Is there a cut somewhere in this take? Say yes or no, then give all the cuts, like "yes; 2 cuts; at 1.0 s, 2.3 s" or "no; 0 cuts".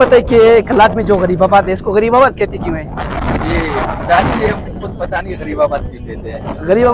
no; 0 cuts